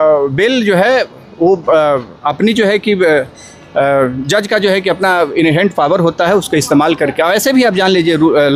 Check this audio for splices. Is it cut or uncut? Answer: uncut